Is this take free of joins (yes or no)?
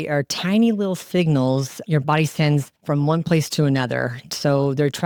yes